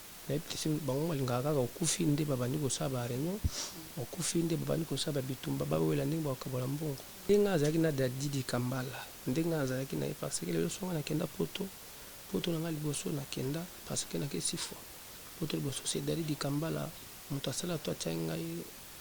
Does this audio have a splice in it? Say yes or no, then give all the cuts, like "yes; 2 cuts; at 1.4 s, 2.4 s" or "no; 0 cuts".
yes; 1 cut; at 7.3 s